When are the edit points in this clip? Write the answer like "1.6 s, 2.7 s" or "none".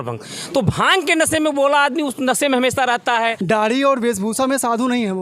3.4 s